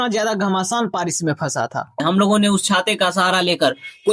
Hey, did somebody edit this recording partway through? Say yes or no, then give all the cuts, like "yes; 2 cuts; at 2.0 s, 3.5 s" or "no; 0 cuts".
yes; 1 cut; at 2.0 s